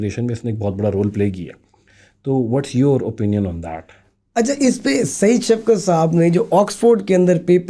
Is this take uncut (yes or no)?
yes